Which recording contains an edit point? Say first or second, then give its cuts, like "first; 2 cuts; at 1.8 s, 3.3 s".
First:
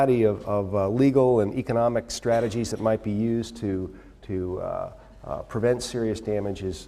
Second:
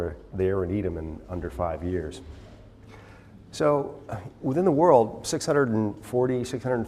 second; 1 cut; at 5.9 s